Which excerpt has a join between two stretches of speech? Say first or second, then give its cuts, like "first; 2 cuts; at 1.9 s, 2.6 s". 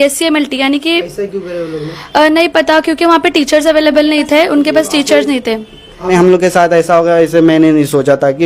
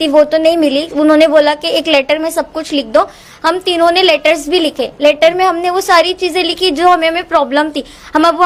first; 1 cut; at 6.0 s